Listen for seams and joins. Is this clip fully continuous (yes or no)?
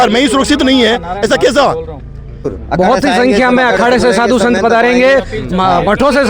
no